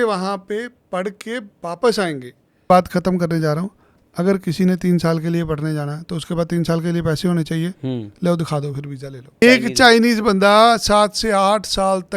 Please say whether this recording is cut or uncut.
cut